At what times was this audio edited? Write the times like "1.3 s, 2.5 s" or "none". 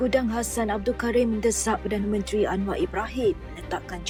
none

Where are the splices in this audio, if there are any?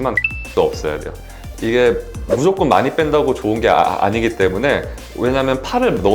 1.1 s

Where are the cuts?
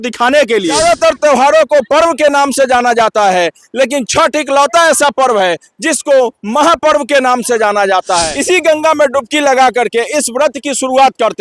0.8 s, 8.3 s

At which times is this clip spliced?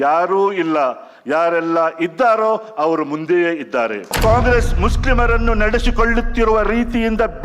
4.2 s

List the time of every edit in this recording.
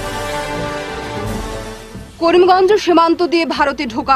none

